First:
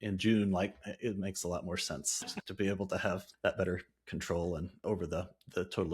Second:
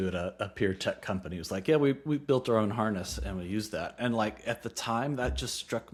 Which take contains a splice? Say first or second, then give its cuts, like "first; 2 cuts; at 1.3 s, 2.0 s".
first; 3 cuts; at 2.3 s, 3.3 s, 4.7 s